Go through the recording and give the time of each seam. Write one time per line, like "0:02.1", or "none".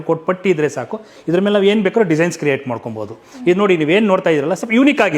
none